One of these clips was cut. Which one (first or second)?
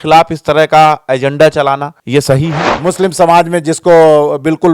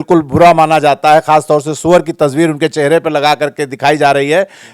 first